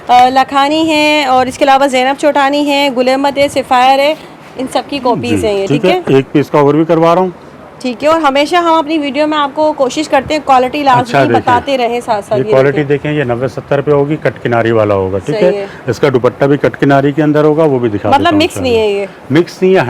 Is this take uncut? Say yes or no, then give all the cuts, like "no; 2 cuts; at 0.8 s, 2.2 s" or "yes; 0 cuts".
yes; 0 cuts